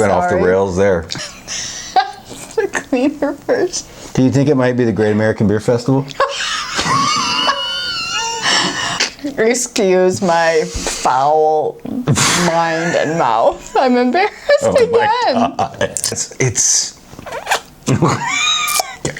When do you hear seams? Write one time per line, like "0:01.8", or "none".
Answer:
0:01.2
0:08.9
0:16.2